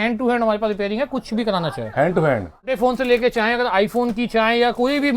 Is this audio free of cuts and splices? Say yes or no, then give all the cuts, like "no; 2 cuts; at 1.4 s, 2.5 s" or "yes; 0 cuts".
no; 1 cut; at 2.5 s